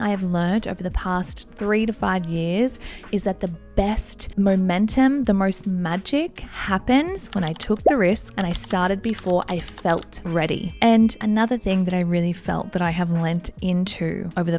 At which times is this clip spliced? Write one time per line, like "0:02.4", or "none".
none